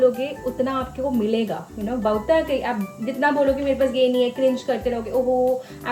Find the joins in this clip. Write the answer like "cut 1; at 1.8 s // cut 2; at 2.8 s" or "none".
none